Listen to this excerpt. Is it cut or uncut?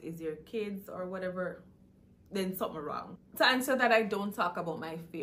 cut